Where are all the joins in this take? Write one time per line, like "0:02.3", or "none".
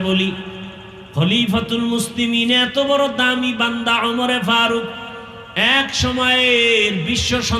none